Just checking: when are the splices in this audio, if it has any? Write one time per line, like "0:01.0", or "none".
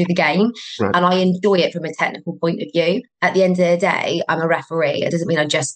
0:03.1